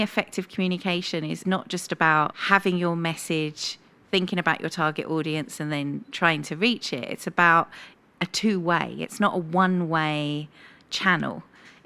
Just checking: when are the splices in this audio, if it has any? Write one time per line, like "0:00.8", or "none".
0:01.4
0:02.4